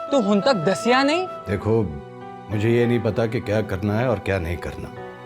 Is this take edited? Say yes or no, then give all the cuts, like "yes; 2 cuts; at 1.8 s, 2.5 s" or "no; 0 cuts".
yes; 1 cut; at 1.4 s